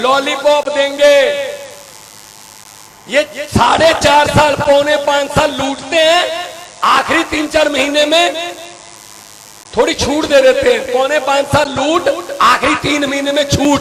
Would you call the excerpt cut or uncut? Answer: uncut